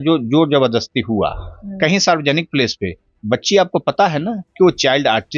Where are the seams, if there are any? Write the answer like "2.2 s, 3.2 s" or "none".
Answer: none